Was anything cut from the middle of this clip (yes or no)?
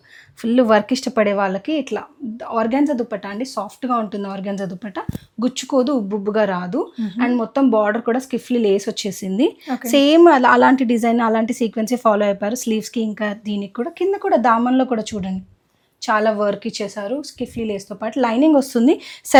no